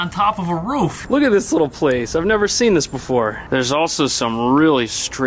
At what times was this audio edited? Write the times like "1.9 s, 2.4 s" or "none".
1.0 s